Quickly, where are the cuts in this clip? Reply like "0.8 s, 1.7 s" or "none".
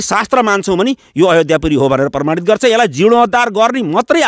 none